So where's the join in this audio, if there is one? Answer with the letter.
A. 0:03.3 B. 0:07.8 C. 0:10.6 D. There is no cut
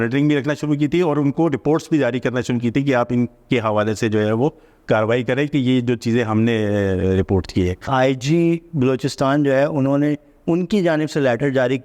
B